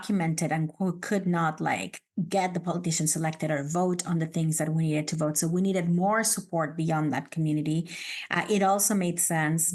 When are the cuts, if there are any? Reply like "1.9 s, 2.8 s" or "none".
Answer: none